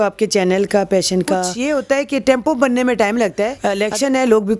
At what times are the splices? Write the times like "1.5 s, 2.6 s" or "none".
1.5 s, 3.6 s